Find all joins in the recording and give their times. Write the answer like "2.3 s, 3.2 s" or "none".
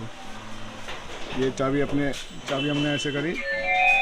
none